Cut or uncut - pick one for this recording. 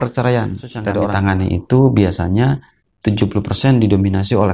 cut